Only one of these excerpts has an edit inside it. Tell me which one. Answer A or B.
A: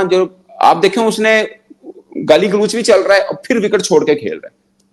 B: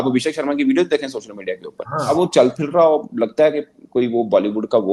B